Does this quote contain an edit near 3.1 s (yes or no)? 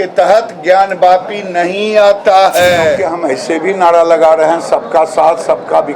yes